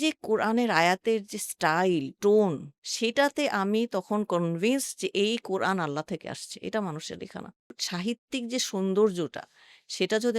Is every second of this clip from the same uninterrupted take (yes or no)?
no